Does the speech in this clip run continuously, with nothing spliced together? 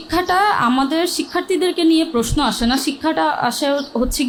yes; 0 cuts

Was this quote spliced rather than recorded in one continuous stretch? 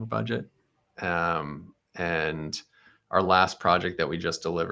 no; 0 cuts

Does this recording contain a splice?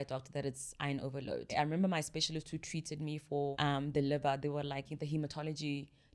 yes; 3 cuts; at 1.5 s, 3.5 s, 4.9 s

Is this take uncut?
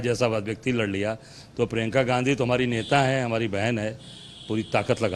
yes; 0 cuts

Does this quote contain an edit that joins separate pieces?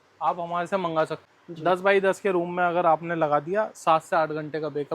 yes; 1 cut; at 1.2 s

